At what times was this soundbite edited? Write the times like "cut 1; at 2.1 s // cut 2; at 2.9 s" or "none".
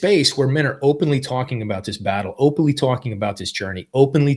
none